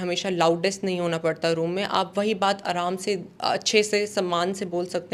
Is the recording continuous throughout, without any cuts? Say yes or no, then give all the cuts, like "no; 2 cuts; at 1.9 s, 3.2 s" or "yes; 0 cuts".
yes; 0 cuts